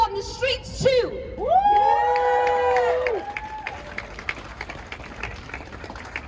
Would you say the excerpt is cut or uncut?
uncut